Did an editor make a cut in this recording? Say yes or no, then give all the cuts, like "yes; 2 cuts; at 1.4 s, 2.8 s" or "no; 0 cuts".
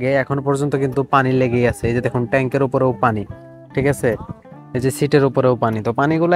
no; 0 cuts